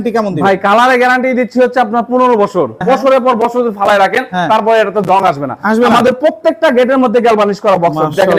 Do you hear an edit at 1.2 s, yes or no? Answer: no